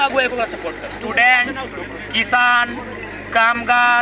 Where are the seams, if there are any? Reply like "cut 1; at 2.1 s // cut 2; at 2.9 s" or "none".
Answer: cut 1; at 1.0 s